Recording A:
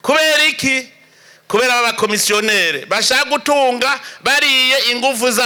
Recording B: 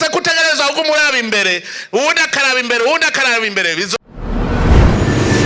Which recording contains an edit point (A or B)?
B